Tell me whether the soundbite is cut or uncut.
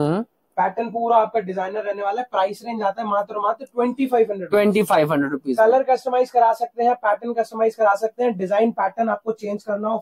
uncut